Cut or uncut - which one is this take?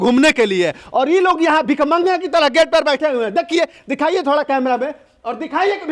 uncut